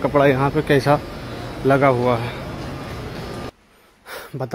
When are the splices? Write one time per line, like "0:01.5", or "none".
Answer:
0:03.5